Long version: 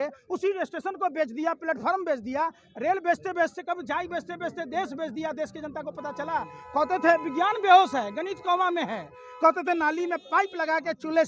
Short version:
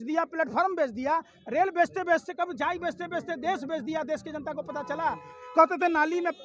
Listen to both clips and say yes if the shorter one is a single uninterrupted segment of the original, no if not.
no